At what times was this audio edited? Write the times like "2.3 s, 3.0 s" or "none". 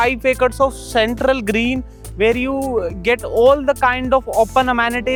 none